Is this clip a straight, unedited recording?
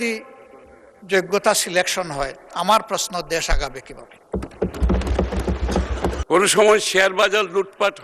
no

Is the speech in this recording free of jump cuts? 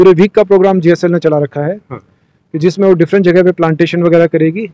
yes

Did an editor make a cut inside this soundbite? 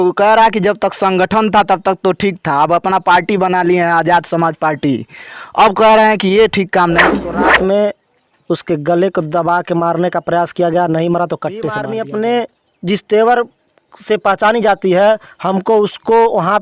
yes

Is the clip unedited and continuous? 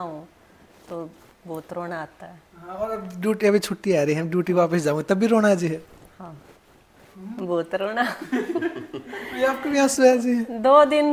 yes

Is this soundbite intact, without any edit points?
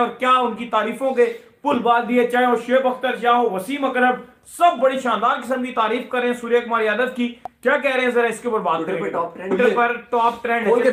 no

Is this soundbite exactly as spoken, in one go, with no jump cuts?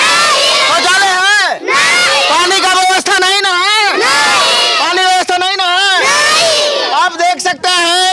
yes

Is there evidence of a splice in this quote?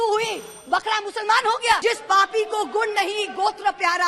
yes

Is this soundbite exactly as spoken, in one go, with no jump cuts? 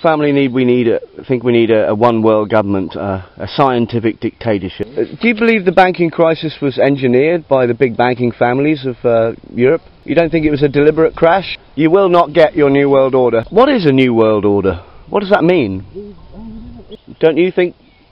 no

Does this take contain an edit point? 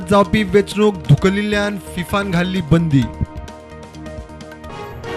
yes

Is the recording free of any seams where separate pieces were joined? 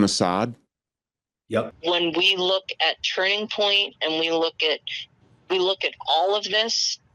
no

